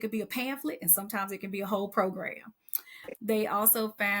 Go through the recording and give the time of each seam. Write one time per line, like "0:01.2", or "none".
0:03.1

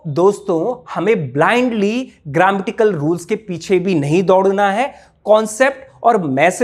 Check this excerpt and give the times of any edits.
none

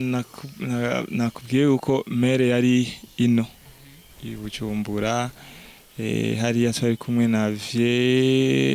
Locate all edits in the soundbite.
none

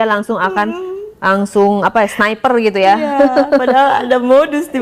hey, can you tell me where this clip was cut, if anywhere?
none

